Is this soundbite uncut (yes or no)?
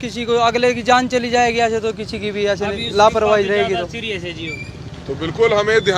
yes